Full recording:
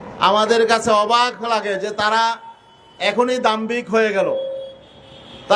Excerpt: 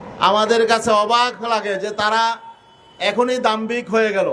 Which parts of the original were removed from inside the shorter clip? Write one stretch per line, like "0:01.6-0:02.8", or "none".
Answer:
none